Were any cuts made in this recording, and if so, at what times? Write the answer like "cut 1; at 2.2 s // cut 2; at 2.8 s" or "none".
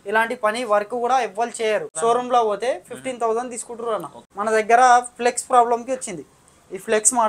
cut 1; at 1.9 s // cut 2; at 4.2 s

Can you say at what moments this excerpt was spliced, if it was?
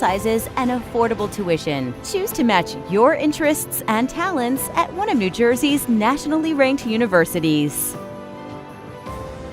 cut 1; at 7.7 s

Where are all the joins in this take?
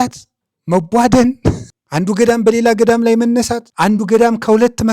cut 1; at 1.7 s // cut 2; at 3.6 s

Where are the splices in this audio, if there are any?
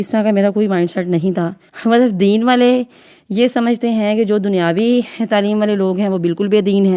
cut 1; at 1.6 s

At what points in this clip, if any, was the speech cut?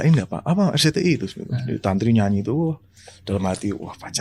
none

